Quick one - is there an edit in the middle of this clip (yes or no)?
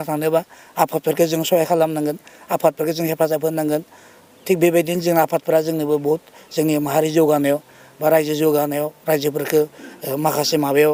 no